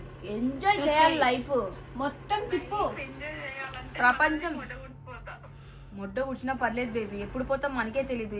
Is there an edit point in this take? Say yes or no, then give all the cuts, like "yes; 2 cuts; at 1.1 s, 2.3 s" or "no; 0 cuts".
no; 0 cuts